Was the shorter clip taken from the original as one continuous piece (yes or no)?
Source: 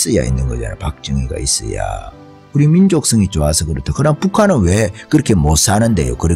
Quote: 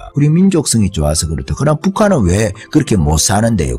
yes